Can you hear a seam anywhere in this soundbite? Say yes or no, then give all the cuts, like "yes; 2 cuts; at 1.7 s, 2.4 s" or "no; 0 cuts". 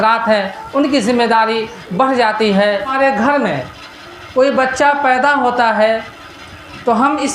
yes; 1 cut; at 2.9 s